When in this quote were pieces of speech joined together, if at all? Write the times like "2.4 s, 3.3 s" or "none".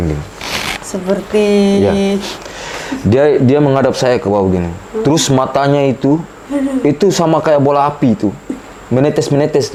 none